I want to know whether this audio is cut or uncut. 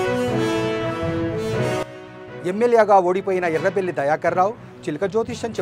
uncut